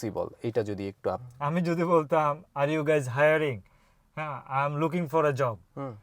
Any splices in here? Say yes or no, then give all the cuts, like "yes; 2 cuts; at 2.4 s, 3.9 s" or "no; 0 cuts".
yes; 1 cut; at 1.2 s